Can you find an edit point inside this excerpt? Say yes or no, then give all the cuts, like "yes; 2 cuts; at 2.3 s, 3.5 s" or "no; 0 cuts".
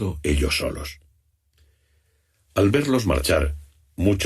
yes; 1 cut; at 1.8 s